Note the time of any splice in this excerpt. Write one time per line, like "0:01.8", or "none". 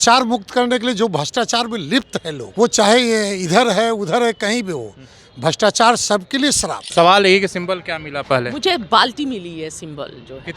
0:02.4
0:06.7